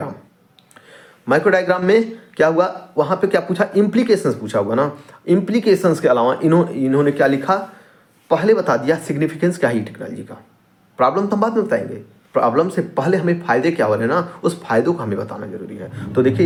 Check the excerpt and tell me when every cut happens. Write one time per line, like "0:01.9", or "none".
none